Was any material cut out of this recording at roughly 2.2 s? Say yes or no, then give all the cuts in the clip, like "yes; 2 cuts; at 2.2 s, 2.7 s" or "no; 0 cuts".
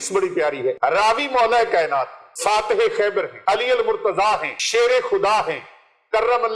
yes; 4 cuts; at 0.8 s, 2.2 s, 3.3 s, 4.5 s